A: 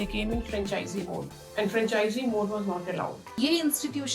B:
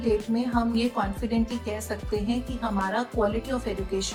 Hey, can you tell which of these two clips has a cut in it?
A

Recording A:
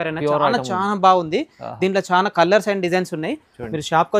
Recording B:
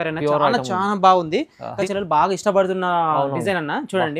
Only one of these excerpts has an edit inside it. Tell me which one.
B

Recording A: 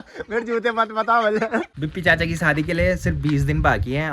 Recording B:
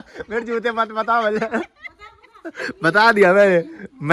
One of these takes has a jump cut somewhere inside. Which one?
A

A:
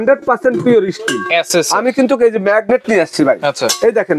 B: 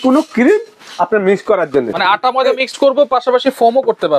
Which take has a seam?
B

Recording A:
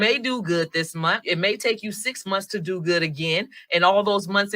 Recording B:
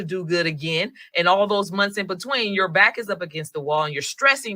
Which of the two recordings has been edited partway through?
A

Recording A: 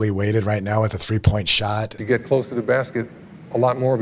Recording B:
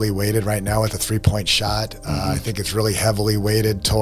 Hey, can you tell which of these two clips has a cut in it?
A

